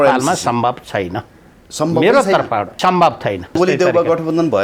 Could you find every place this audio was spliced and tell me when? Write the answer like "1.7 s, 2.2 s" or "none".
2.7 s, 3.5 s